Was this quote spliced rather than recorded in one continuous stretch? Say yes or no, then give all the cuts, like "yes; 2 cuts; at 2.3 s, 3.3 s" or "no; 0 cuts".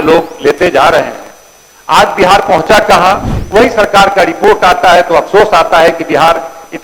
yes; 1 cut; at 3.3 s